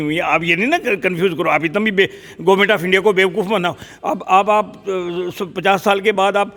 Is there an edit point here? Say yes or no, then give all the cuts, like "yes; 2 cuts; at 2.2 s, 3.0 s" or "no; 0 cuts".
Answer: no; 0 cuts